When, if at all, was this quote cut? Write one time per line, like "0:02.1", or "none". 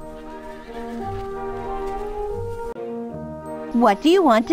0:03.1